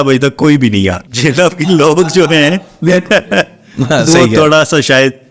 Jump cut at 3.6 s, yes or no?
no